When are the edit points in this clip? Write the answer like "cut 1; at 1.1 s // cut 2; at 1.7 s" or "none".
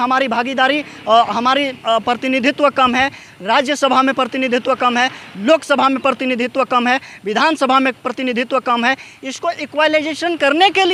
none